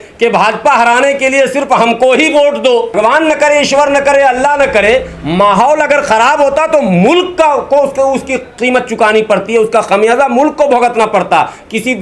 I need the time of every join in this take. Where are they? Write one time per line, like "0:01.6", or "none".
0:02.9